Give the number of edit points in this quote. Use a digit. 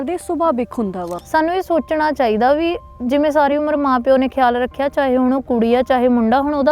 1